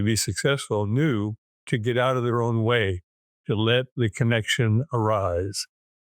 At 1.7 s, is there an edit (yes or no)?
yes